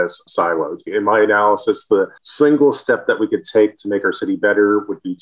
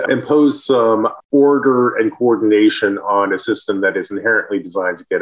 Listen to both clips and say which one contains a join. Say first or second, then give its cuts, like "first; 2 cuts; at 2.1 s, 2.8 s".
first; 2 cuts; at 0.9 s, 2.2 s